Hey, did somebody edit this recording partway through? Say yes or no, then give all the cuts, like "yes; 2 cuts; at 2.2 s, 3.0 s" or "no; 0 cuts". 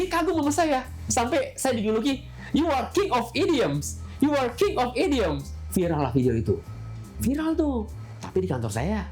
no; 0 cuts